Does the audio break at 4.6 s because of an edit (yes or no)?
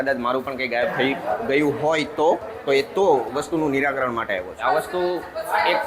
yes